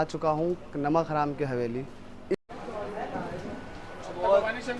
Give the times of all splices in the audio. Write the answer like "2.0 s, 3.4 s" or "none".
2.3 s